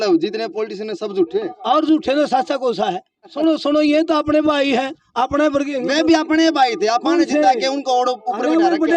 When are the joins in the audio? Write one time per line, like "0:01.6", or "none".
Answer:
0:03.3